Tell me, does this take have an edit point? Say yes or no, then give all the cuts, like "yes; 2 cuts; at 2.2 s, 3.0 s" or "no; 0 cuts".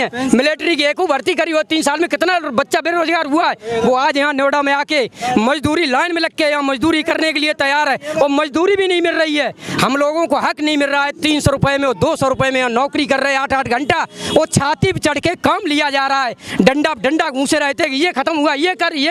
no; 0 cuts